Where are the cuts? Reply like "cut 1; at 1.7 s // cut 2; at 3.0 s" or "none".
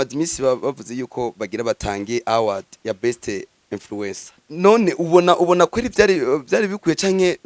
cut 1; at 4.3 s